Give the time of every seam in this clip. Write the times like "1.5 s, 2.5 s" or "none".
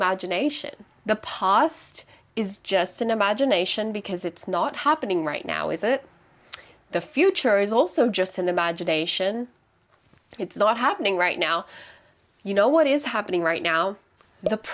none